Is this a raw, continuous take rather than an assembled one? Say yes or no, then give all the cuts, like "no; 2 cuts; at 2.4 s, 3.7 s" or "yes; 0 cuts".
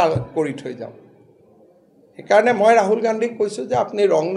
yes; 0 cuts